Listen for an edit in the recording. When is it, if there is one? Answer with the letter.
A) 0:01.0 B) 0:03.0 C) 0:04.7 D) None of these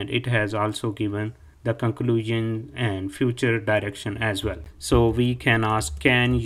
C